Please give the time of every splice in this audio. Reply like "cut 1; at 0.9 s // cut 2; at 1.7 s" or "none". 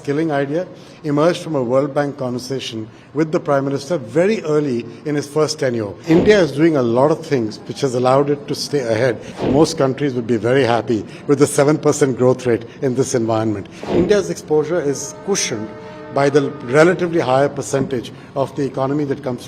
cut 1; at 5.9 s // cut 2; at 9.3 s // cut 3; at 13.8 s